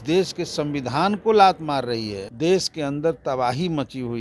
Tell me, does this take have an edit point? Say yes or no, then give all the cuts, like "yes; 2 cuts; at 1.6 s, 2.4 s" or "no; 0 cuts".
yes; 1 cut; at 2.2 s